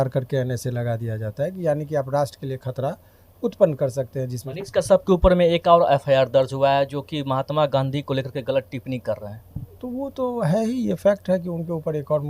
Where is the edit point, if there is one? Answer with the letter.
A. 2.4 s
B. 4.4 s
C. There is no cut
B